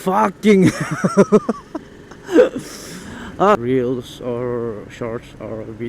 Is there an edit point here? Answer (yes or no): yes